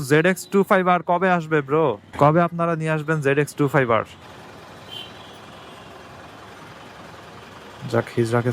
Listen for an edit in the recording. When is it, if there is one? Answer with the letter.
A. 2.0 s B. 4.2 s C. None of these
B